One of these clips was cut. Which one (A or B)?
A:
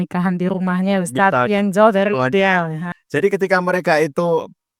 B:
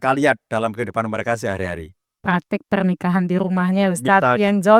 A